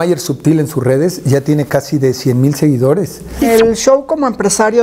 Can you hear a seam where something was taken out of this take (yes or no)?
yes